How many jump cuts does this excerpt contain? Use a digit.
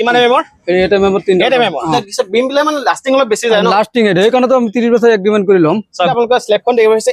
2